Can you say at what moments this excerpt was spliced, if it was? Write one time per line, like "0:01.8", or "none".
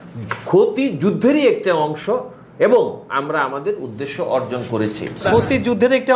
0:05.2